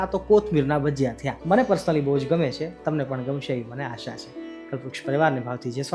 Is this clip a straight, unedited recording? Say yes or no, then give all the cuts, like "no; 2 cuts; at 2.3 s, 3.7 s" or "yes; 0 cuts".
no; 1 cut; at 1.2 s